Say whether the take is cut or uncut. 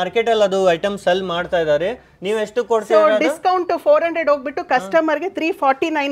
uncut